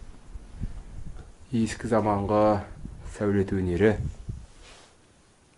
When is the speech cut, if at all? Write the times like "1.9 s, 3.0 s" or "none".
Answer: none

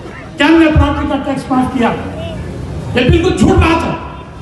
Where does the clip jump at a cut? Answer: none

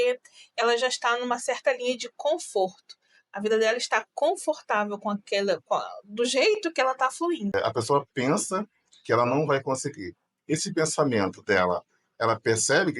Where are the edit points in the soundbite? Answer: 7.5 s

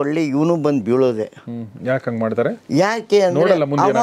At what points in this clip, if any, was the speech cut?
none

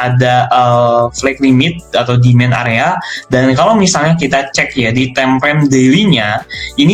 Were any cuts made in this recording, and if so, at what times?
none

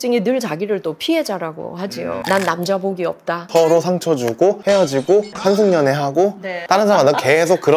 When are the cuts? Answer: 2.2 s, 3.4 s

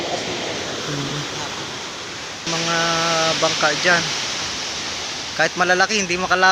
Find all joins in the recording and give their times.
2.5 s

